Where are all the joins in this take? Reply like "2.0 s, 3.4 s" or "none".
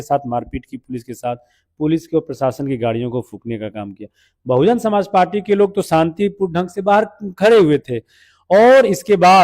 none